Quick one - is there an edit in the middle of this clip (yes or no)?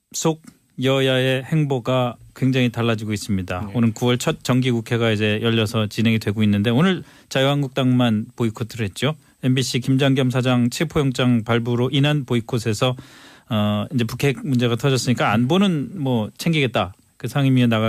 no